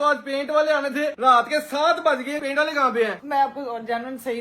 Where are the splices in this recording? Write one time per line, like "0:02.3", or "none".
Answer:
0:03.2